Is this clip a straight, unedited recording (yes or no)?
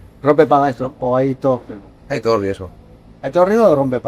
yes